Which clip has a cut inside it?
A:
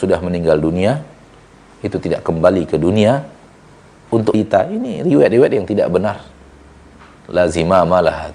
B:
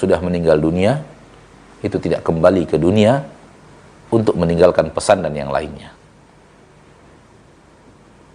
A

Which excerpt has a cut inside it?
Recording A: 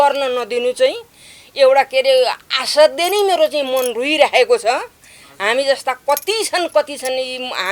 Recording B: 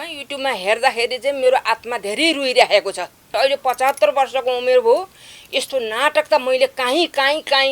B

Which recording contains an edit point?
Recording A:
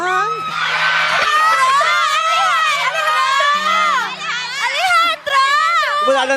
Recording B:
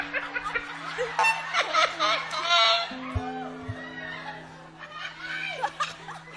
A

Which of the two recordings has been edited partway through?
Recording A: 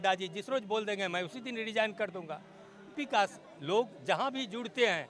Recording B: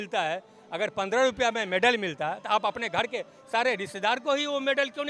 A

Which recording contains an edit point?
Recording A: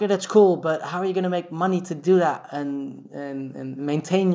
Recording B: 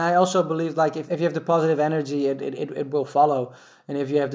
B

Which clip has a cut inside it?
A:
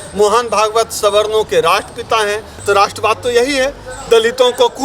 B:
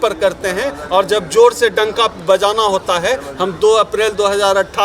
A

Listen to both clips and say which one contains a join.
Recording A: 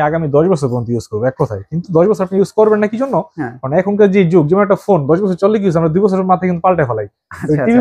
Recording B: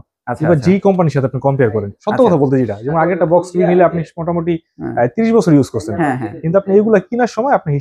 B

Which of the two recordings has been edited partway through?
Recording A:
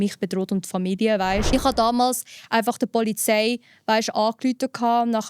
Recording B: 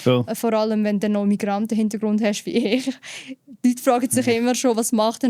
A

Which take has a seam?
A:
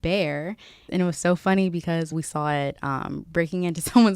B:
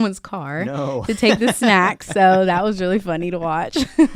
A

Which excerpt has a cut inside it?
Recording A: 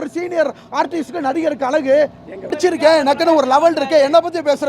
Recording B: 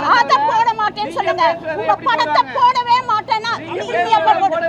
A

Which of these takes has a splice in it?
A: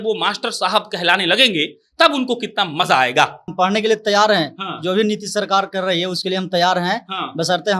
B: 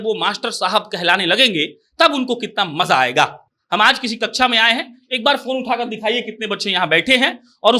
A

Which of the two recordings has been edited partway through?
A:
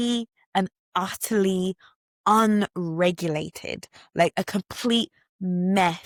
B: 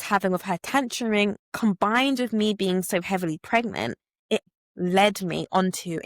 B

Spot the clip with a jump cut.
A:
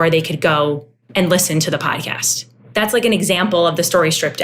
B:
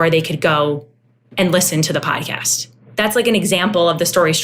A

